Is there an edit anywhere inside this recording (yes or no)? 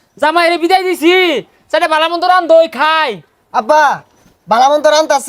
no